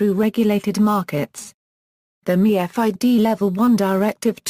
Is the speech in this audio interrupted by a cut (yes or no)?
yes